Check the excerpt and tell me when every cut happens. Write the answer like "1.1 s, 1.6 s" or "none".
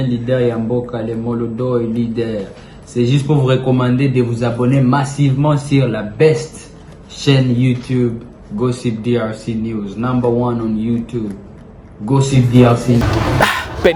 13.0 s